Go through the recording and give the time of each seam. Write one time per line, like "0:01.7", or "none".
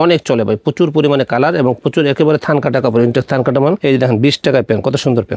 0:03.8